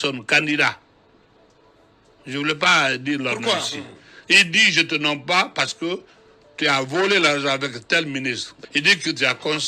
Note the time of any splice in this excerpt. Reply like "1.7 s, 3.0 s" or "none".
8.5 s

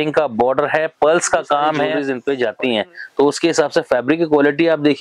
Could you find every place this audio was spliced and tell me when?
2.1 s

